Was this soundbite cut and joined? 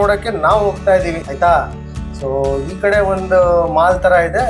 yes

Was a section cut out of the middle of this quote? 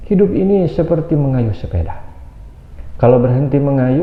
no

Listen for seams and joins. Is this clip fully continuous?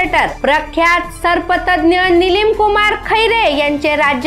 yes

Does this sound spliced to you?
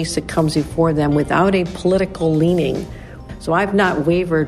yes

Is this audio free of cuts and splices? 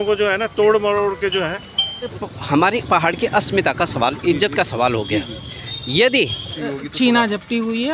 no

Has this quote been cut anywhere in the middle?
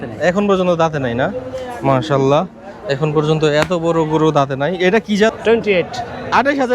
yes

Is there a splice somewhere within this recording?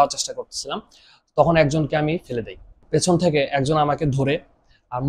yes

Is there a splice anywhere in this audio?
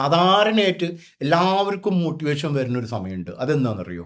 no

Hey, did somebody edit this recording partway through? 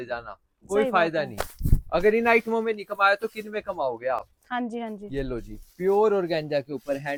no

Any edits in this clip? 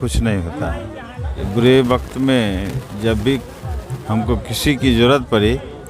yes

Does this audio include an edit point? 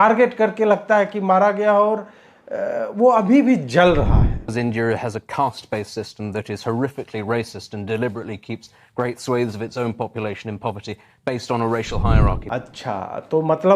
yes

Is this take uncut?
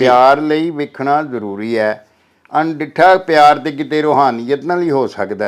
yes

